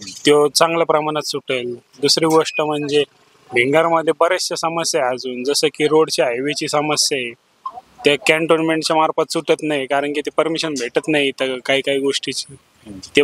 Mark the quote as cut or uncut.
uncut